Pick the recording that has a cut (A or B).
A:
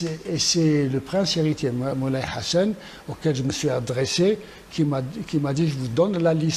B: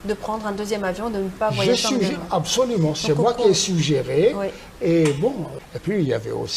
B